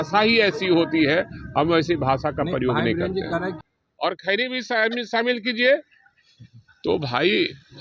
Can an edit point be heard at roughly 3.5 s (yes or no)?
yes